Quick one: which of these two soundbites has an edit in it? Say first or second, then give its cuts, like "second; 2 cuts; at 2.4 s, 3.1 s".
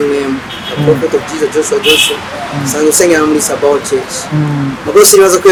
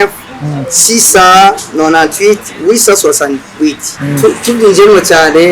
second; 1 cut; at 3.9 s